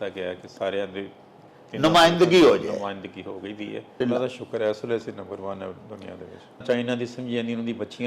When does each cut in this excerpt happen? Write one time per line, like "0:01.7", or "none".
0:04.0
0:06.6